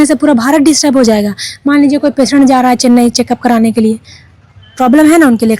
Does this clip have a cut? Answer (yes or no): no